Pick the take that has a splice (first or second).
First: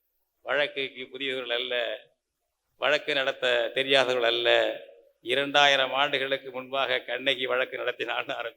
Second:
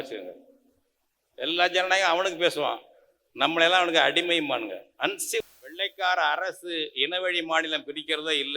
second